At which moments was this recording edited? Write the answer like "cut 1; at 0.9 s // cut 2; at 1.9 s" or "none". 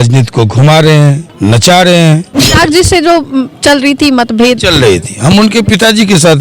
cut 1; at 2.3 s